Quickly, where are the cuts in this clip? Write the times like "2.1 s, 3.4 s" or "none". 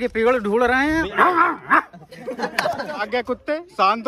0.9 s, 3.1 s